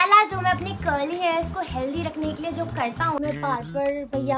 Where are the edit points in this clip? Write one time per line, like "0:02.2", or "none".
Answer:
0:03.2